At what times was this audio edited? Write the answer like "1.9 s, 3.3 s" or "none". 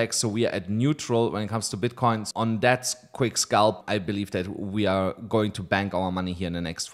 2.3 s, 3.8 s